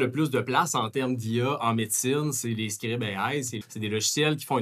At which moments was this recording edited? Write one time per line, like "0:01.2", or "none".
0:03.6